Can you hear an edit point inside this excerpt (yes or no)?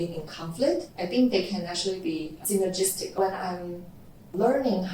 yes